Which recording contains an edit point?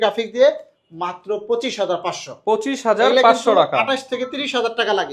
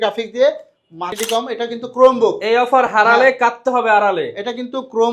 second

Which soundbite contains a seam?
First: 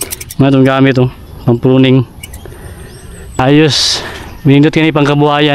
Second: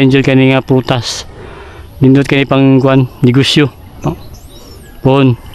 first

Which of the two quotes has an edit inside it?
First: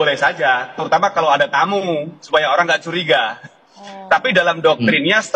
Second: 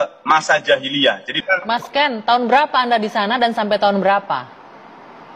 second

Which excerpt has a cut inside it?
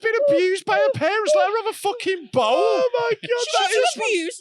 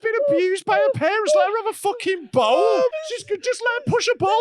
second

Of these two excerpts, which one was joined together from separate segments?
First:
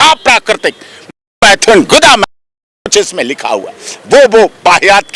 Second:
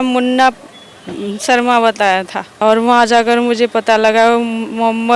second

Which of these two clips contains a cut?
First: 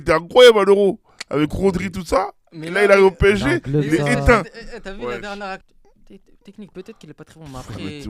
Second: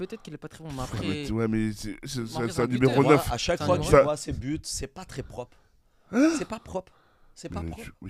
first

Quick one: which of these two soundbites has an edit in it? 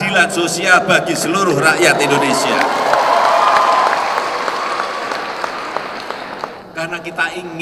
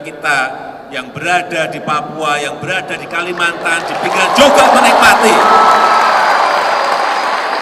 first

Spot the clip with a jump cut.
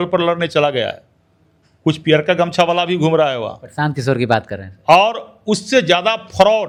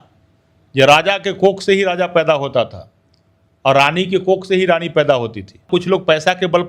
second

